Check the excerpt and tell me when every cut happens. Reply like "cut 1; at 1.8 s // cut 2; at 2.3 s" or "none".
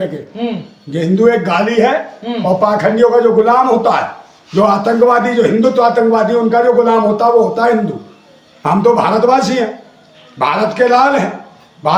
none

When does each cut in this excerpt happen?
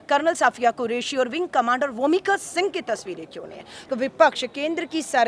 cut 1; at 3.9 s

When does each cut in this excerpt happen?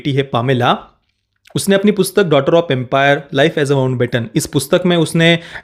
none

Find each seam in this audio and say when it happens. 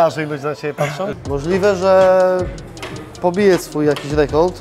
cut 1; at 1.1 s

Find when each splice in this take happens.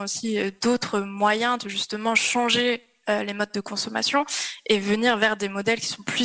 none

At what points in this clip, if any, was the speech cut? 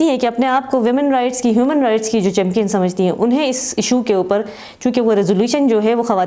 none

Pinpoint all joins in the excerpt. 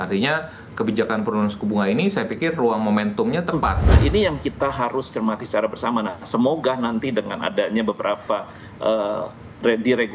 cut 1; at 4.0 s

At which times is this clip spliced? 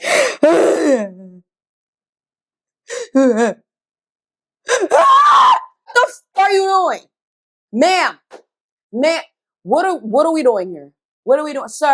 cut 1; at 5.9 s

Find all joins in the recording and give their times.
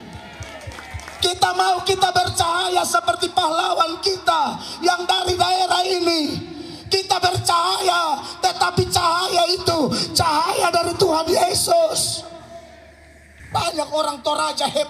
cut 1; at 13.3 s

